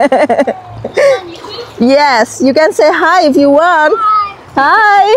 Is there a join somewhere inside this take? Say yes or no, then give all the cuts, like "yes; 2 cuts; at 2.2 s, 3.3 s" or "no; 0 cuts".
no; 0 cuts